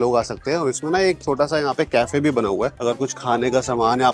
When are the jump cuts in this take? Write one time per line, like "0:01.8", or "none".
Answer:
none